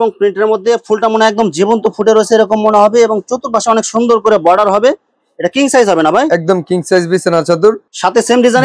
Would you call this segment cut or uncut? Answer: uncut